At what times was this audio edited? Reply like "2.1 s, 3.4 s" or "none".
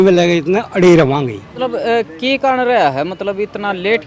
1.4 s